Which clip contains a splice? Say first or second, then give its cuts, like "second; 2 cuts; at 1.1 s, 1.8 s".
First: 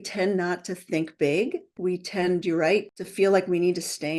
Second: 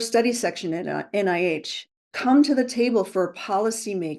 first; 1 cut; at 2.9 s